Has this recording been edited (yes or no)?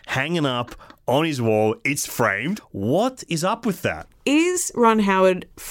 yes